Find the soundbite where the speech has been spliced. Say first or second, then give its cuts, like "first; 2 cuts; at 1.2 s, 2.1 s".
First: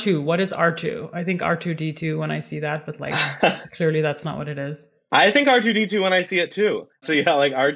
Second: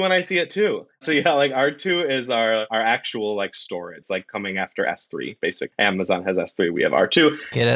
second; 3 cuts; at 2.7 s, 4.0 s, 5.6 s